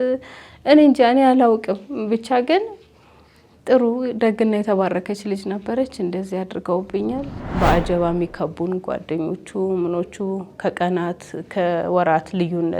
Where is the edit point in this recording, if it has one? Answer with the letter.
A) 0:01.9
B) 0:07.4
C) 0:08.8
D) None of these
B